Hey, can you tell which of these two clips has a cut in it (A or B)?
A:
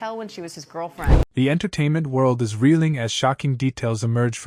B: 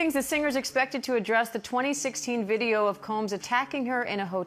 A